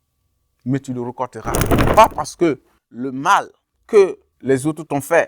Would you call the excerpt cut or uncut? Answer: cut